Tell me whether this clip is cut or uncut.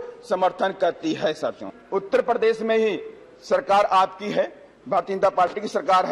cut